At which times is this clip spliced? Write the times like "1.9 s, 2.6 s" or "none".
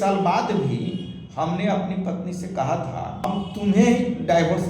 3.3 s